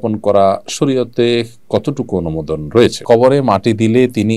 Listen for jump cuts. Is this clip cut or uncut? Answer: cut